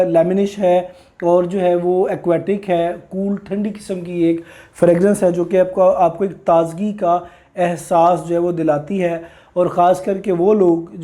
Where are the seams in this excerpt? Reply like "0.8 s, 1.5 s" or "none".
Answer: none